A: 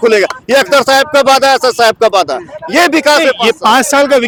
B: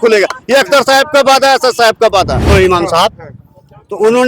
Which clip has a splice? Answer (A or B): B